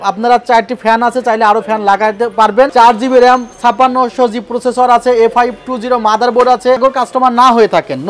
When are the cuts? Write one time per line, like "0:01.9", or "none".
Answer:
0:02.7
0:06.8